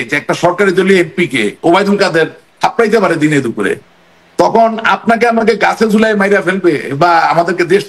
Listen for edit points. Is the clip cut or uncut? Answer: uncut